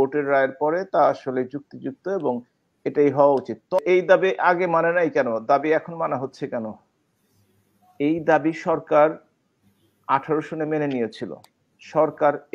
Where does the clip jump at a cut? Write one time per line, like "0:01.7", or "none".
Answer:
0:03.8